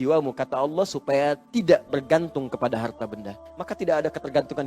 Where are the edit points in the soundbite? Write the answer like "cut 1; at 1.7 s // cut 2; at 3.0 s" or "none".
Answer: cut 1; at 3.5 s